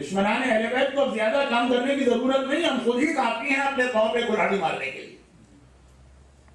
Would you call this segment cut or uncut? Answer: cut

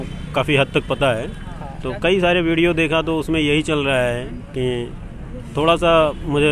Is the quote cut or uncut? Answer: uncut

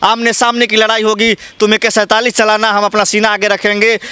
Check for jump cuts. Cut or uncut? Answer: uncut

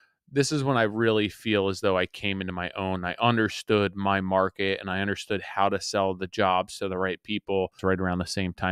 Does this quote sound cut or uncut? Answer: cut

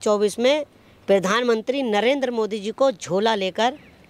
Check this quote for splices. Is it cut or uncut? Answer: uncut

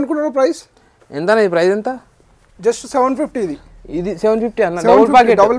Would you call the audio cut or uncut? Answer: uncut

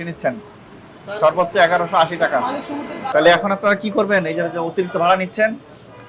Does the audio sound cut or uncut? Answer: cut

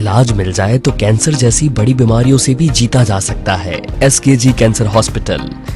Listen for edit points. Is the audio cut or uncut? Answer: cut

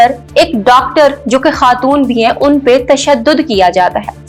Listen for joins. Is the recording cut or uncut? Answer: uncut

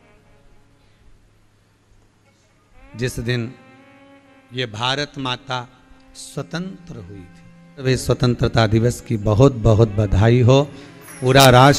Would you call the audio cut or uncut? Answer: cut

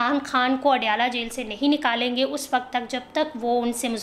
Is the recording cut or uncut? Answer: uncut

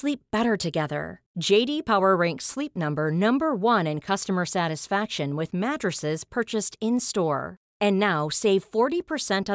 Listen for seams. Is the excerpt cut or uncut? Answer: uncut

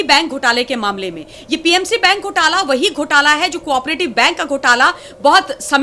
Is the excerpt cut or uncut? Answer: uncut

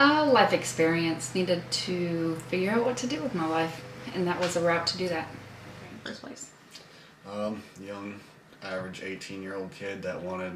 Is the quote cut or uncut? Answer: cut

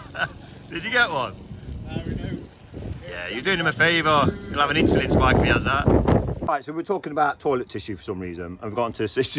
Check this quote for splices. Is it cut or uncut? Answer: cut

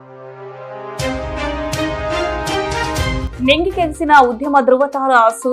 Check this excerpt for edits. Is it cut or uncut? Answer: uncut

